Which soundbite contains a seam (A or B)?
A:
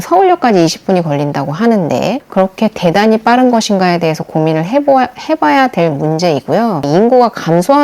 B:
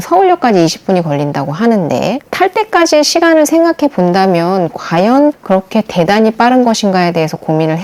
A